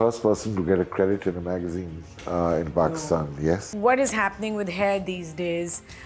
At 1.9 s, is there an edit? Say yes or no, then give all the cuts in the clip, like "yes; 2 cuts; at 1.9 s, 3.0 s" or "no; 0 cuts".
no; 1 cut; at 3.7 s